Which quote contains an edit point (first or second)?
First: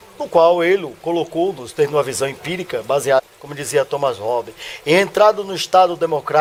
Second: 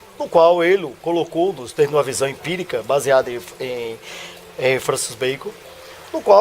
second